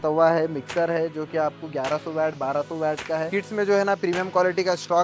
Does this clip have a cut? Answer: yes; 1 cut; at 3.3 s

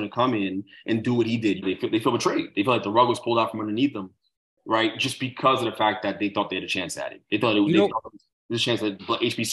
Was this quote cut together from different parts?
yes; 1 cut; at 1.6 s

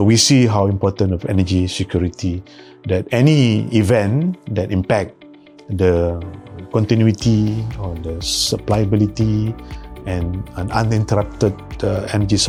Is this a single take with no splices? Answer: yes; 0 cuts

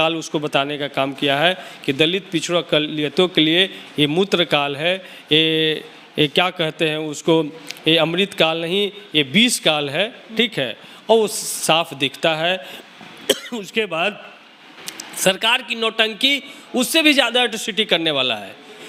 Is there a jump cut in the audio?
no; 0 cuts

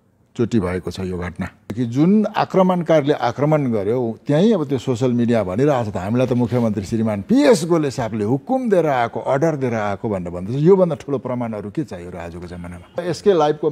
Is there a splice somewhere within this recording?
yes; 2 cuts; at 1.8 s, 13.0 s

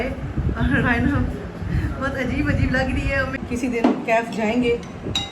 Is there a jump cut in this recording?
yes; 1 cut; at 3.3 s

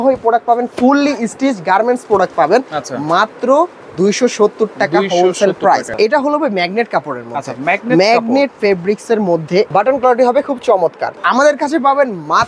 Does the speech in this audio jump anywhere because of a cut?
yes; 3 cuts; at 5.9 s, 9.7 s, 11.2 s

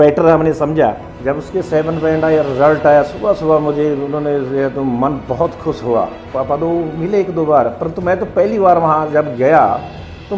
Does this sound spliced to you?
yes; 2 cuts; at 1.1 s, 6.2 s

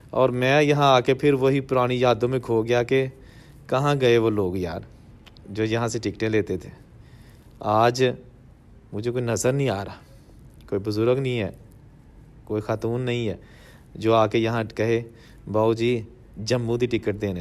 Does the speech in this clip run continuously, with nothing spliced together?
yes; 0 cuts

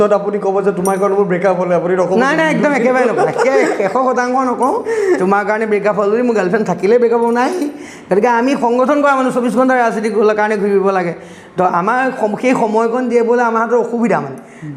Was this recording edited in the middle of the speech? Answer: no; 0 cuts

